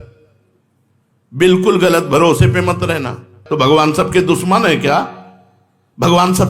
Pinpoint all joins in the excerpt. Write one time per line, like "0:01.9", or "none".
0:03.4